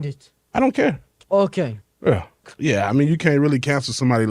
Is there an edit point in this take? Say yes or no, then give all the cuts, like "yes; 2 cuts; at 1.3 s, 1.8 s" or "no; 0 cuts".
yes; 1 cut; at 2.5 s